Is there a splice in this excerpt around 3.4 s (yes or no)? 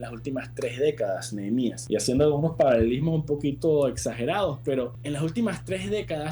no